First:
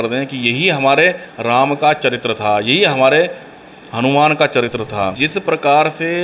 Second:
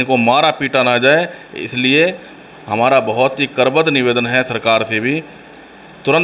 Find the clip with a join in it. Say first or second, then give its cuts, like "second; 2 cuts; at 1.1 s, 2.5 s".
first; 1 cut; at 5.2 s